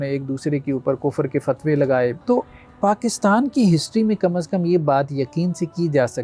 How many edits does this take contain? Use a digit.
1